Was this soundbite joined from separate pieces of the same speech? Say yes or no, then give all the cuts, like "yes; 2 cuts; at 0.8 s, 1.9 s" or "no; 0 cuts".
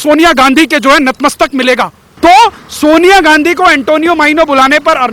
yes; 1 cut; at 2.0 s